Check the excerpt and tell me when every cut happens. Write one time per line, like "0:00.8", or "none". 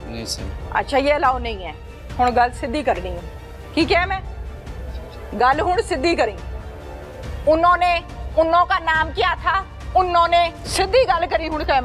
0:02.0
0:10.6